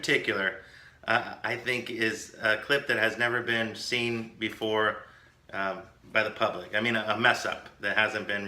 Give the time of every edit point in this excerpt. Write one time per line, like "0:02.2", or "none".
0:02.2